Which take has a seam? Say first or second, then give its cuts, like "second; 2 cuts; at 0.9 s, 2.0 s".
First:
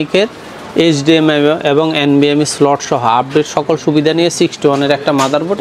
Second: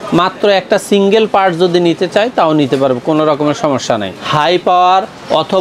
second; 1 cut; at 4.1 s